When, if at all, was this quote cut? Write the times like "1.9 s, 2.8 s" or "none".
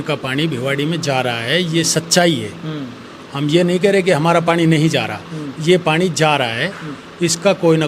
none